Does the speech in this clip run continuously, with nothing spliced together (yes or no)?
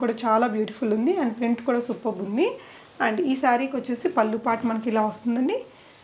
yes